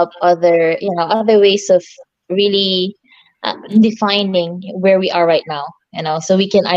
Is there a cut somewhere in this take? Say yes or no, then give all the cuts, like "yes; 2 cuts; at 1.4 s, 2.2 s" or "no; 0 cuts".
no; 0 cuts